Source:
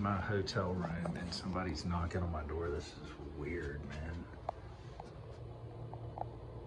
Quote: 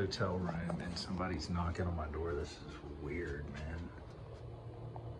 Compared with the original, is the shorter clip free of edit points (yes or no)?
no